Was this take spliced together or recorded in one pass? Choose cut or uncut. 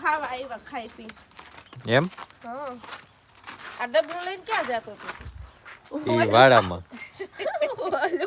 uncut